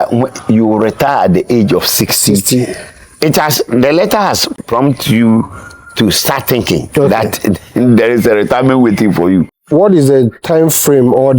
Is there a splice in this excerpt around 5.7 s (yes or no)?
no